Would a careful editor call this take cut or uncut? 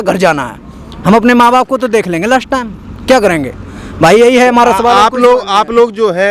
uncut